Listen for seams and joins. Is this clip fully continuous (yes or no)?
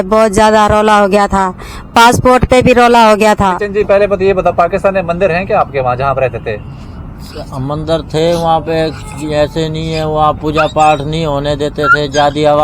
no